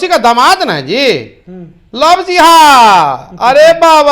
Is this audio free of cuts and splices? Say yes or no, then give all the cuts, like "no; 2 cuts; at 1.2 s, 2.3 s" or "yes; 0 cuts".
yes; 0 cuts